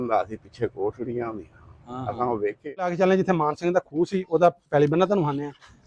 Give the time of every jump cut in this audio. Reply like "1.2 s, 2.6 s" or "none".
3.0 s